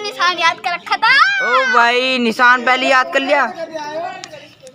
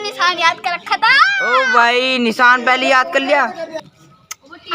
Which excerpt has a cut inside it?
second; 1 cut; at 3.8 s

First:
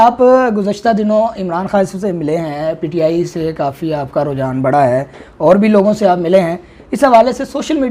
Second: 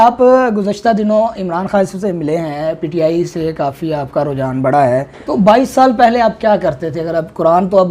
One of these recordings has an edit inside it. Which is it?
second; 1 cut; at 5.2 s

